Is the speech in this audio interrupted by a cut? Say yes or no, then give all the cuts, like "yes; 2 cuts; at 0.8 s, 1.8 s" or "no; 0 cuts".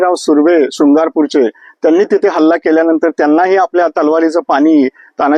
no; 0 cuts